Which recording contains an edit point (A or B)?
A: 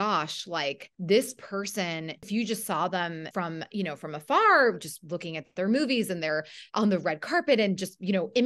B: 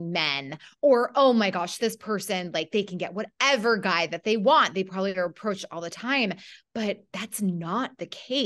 A